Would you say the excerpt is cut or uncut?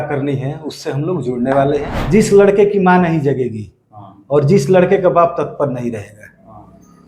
cut